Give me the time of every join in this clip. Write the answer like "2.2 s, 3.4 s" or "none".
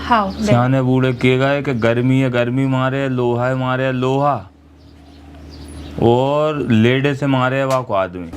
none